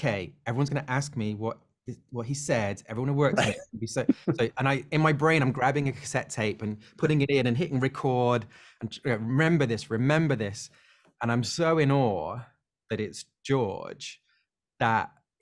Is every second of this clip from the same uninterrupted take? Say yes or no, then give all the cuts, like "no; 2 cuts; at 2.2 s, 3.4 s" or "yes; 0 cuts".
yes; 0 cuts